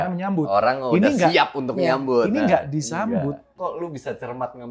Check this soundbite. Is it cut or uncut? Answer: cut